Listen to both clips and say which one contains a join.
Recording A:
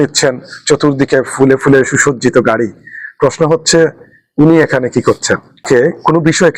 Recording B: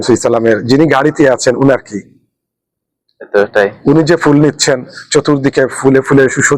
A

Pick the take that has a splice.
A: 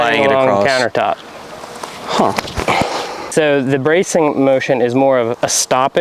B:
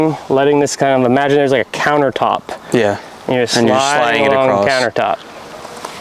A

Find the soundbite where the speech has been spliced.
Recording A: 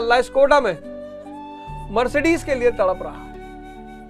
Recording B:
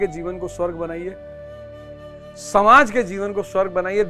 A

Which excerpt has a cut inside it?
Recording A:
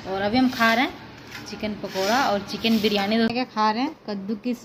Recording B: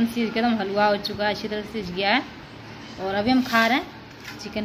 A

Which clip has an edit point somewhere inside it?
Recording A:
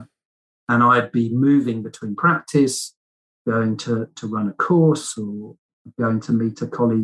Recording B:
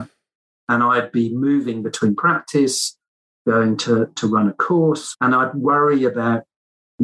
B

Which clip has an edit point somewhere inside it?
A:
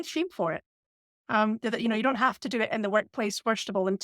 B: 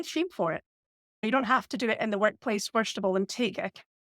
B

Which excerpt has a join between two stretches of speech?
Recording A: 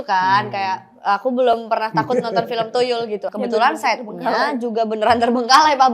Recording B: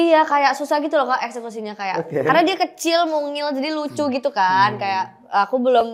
A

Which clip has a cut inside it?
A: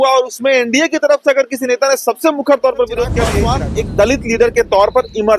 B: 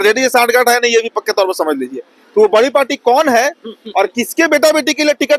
A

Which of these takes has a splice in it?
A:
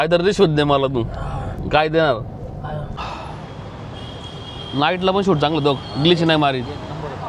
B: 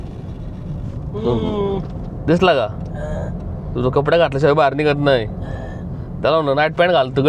A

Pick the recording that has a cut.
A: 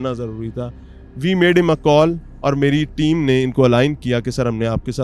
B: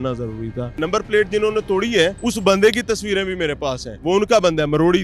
B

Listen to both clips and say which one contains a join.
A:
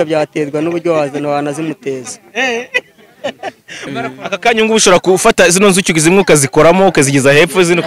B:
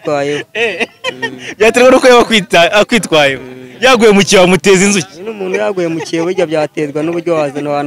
A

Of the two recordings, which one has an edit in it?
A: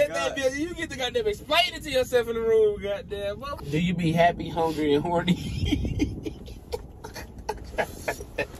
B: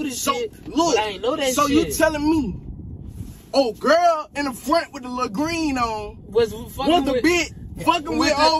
A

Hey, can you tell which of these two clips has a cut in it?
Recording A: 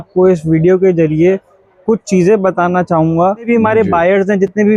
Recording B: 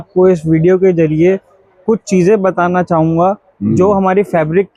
A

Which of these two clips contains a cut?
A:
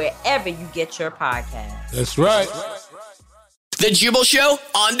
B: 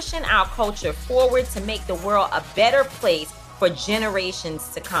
A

